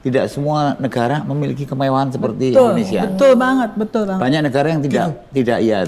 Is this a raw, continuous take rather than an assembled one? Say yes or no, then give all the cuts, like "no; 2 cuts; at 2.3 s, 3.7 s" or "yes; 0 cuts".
yes; 0 cuts